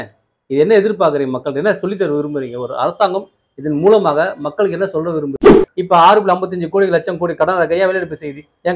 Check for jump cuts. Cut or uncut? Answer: cut